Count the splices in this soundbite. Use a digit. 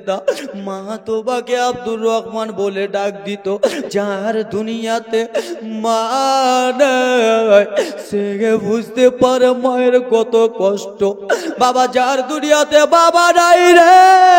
2